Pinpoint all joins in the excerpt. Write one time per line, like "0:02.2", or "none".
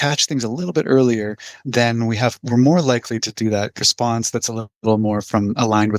0:01.6
0:03.8